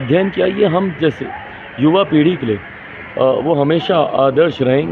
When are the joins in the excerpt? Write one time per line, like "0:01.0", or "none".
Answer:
none